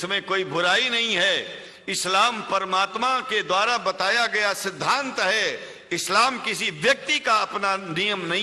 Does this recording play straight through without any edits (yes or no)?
yes